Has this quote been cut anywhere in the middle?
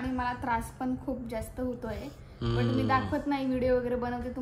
no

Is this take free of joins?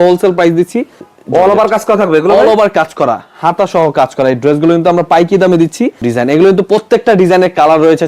no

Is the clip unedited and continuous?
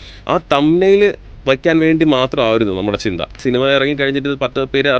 no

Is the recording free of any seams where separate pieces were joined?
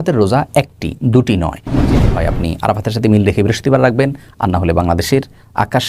no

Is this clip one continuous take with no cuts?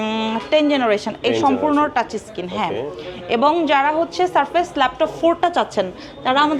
yes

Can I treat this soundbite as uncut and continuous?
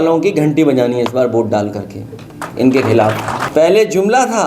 no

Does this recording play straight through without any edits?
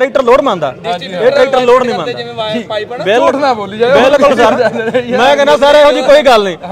yes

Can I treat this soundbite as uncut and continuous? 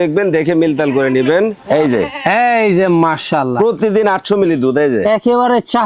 no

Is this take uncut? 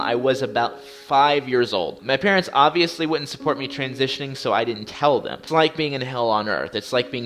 no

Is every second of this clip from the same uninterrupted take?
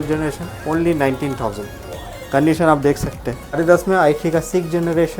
no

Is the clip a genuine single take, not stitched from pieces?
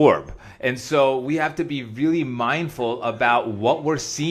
yes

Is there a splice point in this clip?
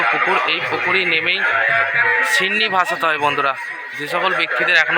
no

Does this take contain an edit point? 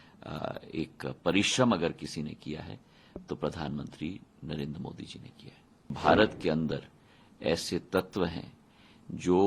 yes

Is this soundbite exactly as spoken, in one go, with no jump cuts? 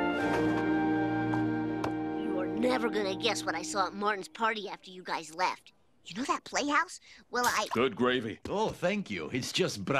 no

